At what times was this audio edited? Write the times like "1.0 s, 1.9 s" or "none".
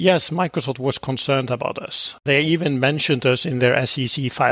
2.2 s